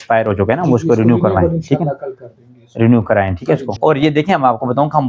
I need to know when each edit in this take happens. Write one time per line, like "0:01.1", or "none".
none